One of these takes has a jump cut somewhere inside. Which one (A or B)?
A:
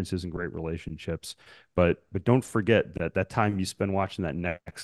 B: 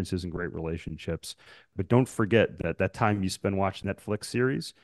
B